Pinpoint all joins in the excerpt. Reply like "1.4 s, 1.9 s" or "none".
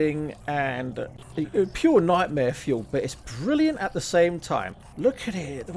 1.2 s, 4.7 s